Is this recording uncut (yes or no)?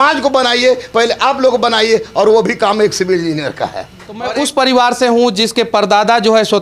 no